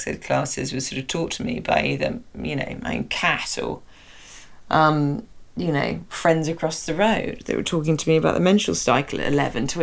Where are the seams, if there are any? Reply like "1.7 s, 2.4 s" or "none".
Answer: none